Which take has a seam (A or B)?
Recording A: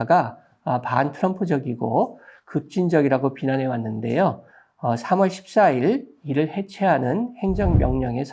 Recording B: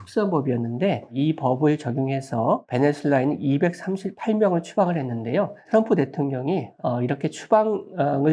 B